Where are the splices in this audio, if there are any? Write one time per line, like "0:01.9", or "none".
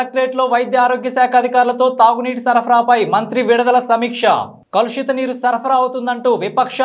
none